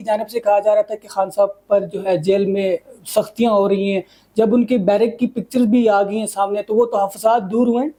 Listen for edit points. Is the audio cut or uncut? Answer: uncut